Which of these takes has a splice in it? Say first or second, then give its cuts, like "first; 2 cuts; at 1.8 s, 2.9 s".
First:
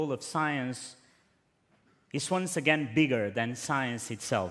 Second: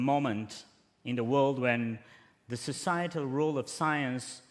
first; 1 cut; at 2.9 s